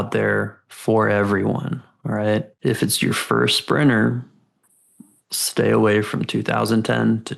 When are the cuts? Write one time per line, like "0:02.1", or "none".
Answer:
0:02.5